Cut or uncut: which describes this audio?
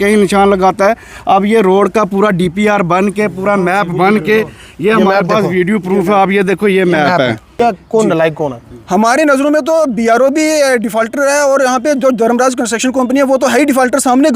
cut